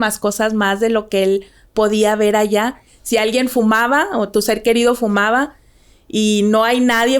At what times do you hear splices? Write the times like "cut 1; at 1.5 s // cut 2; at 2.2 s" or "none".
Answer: cut 1; at 2.9 s